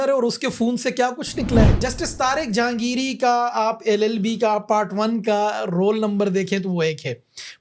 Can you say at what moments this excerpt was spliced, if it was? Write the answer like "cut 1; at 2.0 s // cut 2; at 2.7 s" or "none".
cut 1; at 1.7 s